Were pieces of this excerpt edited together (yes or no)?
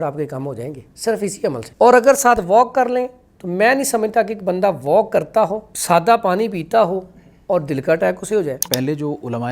yes